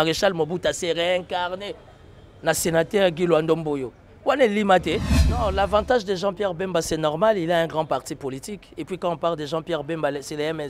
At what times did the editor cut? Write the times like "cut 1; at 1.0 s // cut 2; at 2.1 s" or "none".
cut 1; at 5.2 s